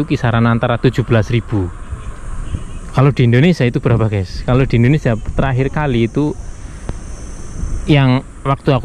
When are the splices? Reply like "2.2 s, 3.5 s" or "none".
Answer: none